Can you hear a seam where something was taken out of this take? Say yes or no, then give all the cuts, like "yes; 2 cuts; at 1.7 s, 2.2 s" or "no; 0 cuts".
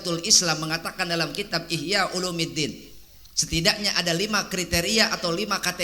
no; 0 cuts